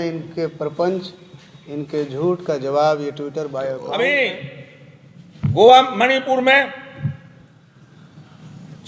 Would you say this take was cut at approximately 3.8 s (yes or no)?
yes